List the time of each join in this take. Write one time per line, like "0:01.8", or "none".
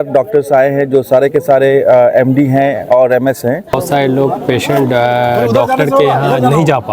0:03.8